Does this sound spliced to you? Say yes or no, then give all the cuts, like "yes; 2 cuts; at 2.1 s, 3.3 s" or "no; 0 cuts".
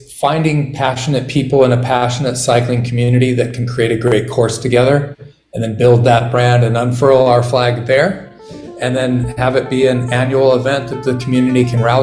no; 0 cuts